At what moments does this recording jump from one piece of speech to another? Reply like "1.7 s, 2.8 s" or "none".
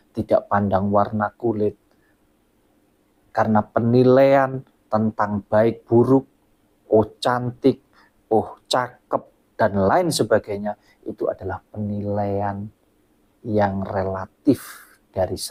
none